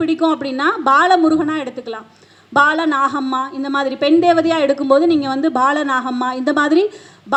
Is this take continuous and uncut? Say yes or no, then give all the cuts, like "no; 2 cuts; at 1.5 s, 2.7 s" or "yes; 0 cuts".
yes; 0 cuts